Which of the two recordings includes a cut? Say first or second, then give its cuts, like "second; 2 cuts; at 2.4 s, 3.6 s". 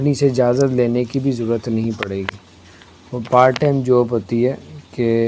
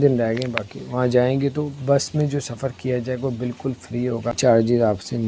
second; 1 cut; at 4.4 s